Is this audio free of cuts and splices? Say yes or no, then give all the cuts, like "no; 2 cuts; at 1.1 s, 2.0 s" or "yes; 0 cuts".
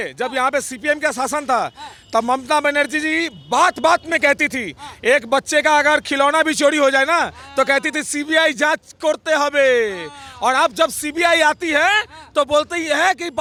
yes; 0 cuts